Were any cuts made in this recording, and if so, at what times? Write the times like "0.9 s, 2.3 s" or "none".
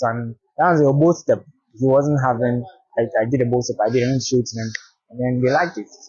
none